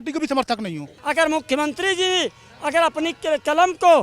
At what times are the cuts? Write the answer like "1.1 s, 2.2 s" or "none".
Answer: 0.9 s